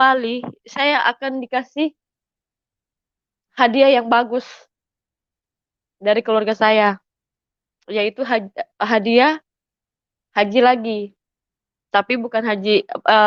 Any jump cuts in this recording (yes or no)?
no